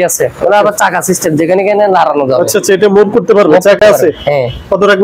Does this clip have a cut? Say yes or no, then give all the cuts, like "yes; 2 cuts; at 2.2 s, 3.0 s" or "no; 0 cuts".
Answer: no; 0 cuts